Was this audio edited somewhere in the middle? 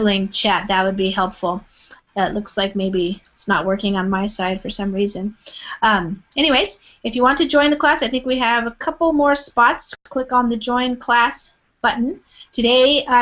no; 0 cuts

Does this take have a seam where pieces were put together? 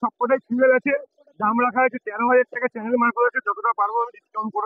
no; 0 cuts

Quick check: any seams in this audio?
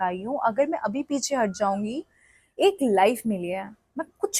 no; 0 cuts

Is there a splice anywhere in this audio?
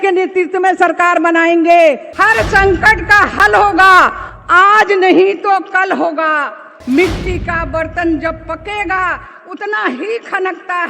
yes; 2 cuts; at 2.1 s, 6.7 s

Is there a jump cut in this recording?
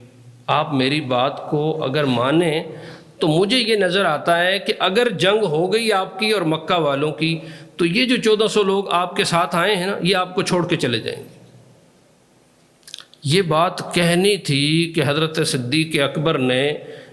no; 0 cuts

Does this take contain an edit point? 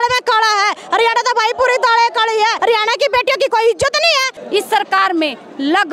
yes; 2 cuts; at 2.6 s, 4.3 s

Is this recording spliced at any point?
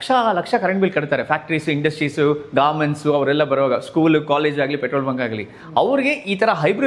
no; 0 cuts

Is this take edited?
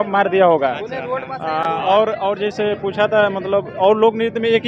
no; 0 cuts

